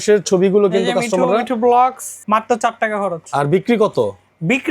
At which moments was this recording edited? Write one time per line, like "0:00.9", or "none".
0:02.1

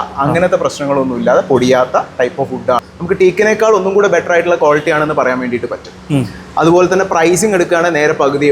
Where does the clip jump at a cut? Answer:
0:02.9

